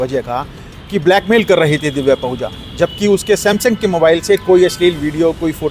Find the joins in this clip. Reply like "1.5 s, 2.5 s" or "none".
none